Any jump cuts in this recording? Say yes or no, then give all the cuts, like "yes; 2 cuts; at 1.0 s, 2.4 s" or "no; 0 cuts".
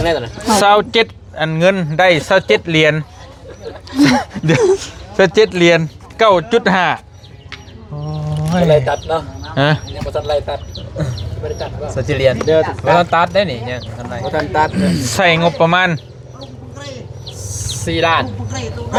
no; 0 cuts